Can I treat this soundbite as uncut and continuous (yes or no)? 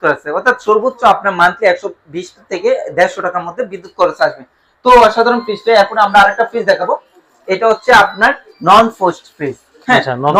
yes